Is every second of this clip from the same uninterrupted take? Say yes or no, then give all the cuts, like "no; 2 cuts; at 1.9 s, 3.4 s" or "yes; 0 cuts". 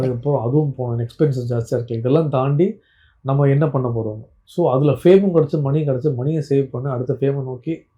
yes; 0 cuts